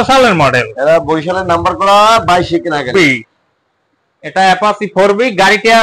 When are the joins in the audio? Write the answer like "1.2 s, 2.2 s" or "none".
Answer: 2.9 s